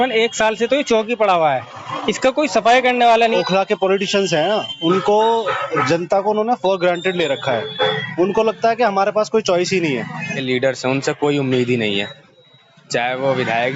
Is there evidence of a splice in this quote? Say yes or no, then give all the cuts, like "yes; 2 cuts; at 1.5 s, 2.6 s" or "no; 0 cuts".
yes; 2 cuts; at 3.4 s, 10.3 s